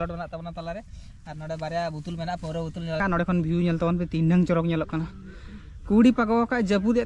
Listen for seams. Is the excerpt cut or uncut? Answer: cut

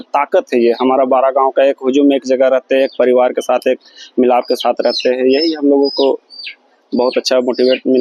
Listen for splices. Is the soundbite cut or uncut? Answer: uncut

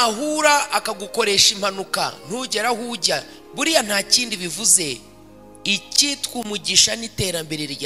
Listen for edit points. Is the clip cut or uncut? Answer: uncut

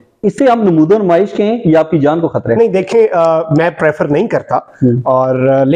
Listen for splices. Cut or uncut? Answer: uncut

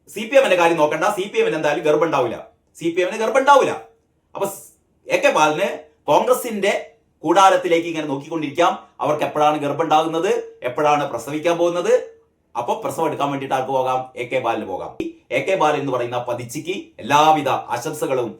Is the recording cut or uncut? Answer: cut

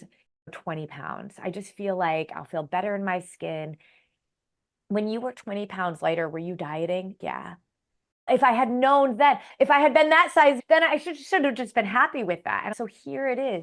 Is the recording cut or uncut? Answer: cut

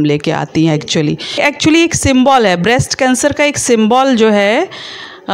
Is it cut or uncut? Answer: cut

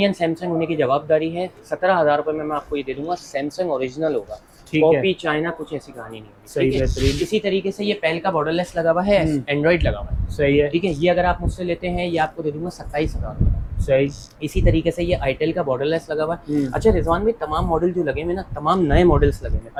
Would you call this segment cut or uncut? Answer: uncut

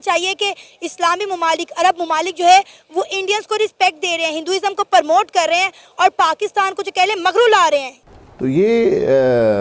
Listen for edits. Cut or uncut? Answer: uncut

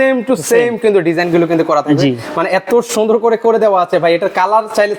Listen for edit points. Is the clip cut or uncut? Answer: uncut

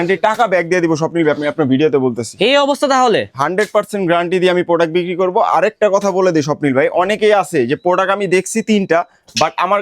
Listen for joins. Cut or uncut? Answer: uncut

